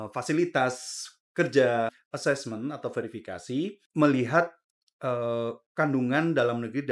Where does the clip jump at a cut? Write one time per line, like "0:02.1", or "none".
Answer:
0:02.0
0:03.8